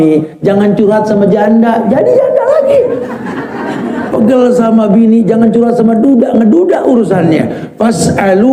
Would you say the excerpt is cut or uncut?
uncut